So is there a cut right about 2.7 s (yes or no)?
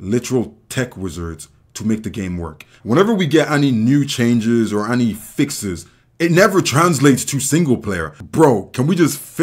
yes